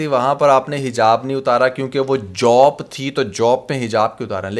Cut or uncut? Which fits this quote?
uncut